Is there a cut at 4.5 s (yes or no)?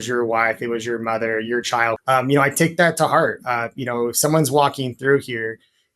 no